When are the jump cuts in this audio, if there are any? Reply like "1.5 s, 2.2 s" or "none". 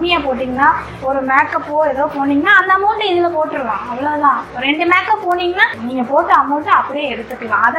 5.8 s